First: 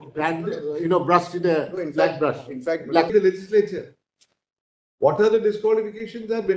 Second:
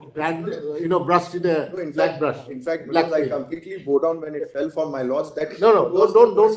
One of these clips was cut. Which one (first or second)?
first